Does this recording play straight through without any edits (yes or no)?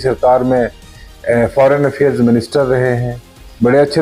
yes